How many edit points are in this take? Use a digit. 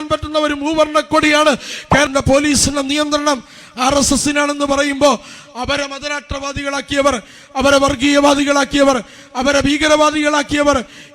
1